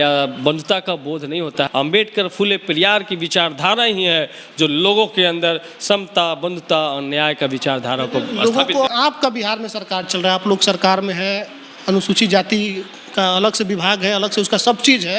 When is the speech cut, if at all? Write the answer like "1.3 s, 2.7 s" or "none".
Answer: 1.7 s, 8.9 s